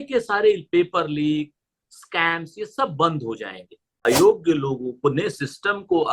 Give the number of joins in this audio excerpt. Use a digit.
1